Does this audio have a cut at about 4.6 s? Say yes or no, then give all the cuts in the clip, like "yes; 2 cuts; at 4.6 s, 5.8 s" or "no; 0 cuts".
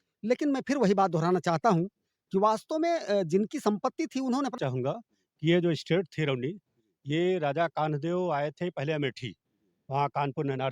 yes; 1 cut; at 4.6 s